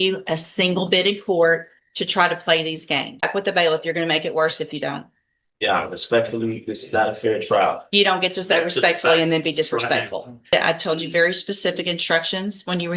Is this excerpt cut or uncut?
cut